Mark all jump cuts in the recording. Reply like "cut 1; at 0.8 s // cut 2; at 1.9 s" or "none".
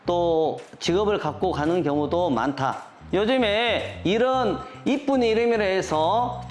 cut 1; at 3.0 s